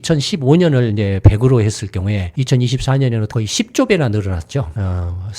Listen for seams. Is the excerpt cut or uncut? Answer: cut